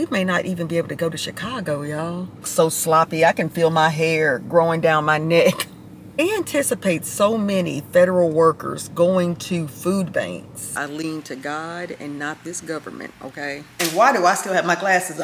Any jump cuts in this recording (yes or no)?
yes